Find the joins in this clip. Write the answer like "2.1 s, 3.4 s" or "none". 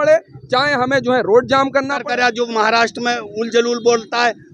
1.9 s